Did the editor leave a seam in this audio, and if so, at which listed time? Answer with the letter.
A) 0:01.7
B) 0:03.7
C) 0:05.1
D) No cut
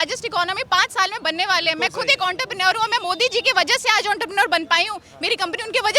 D